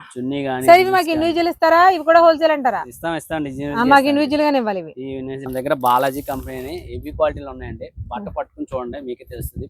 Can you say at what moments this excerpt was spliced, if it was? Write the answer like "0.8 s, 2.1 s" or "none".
5.8 s